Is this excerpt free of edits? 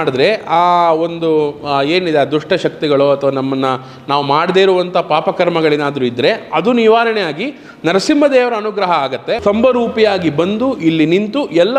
no; 1 cut; at 9.4 s

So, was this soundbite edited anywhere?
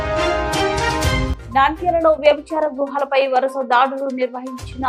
no; 0 cuts

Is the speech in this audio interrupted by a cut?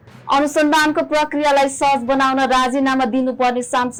no; 0 cuts

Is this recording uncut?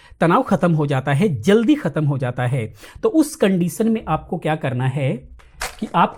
yes; 0 cuts

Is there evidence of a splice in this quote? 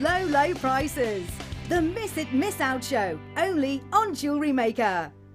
no; 0 cuts

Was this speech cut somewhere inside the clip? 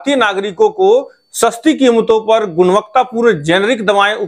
no; 0 cuts

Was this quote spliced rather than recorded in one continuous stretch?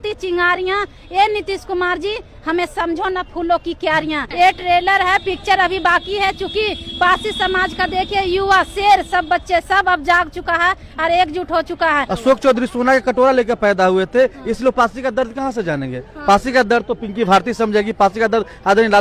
yes; 2 cuts; at 4.3 s, 12.1 s

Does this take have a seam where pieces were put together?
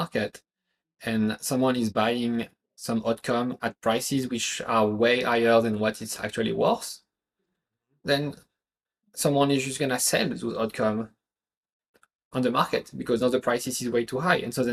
no; 0 cuts

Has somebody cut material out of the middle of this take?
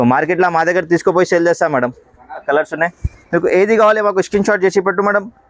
yes; 1 cut; at 2.4 s

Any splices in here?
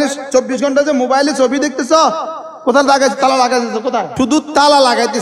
yes; 1 cut; at 4.1 s

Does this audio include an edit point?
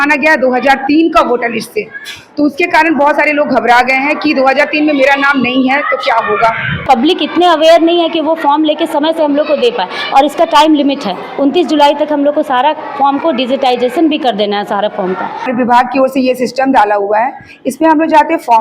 yes; 2 cuts; at 6.8 s, 15.3 s

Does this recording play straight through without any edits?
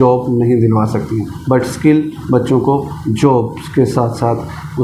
yes; 0 cuts

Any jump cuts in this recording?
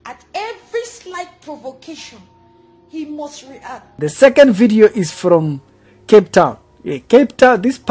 yes; 1 cut; at 3.9 s

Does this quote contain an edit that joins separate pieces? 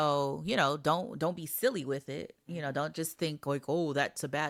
no; 0 cuts

